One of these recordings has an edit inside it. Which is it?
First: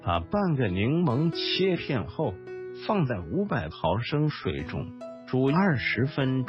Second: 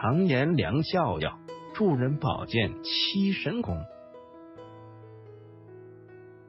first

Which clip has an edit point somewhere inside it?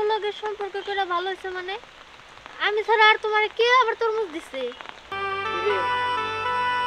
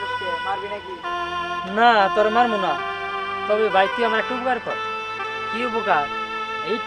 first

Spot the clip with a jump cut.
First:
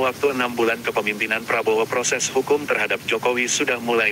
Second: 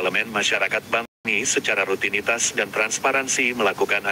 second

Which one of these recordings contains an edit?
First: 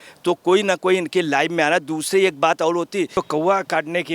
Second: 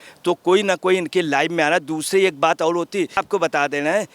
first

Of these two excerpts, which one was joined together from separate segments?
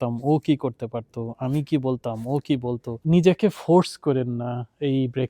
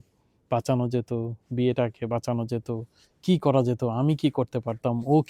first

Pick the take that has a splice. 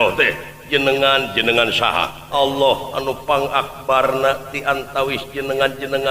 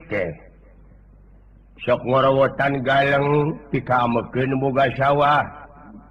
first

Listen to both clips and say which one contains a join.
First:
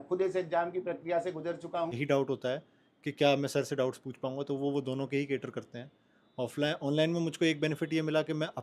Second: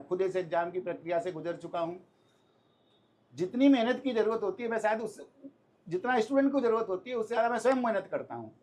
first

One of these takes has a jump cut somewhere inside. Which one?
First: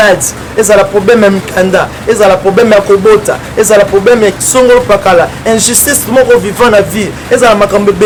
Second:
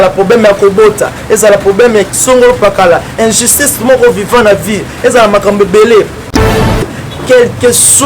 second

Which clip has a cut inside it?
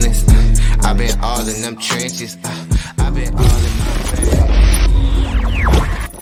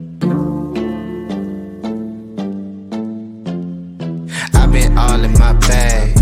second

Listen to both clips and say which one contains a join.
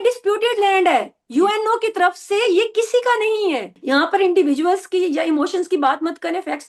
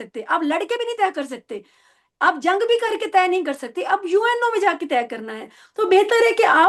first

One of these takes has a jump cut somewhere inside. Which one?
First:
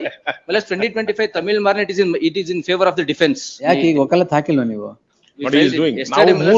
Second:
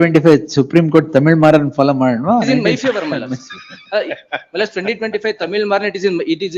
first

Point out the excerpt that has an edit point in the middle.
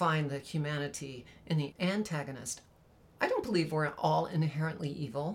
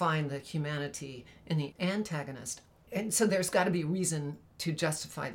second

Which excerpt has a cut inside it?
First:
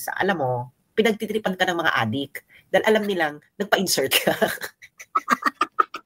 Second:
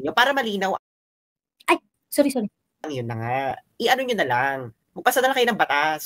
second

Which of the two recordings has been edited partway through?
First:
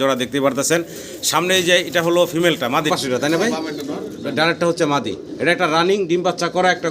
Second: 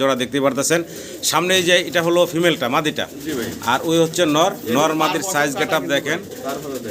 first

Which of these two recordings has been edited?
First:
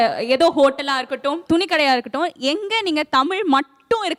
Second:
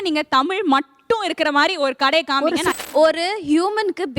second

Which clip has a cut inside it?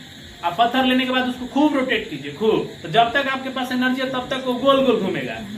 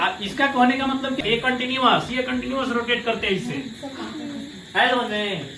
second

